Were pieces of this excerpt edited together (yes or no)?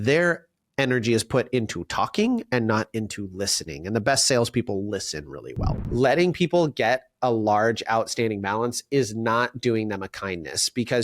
yes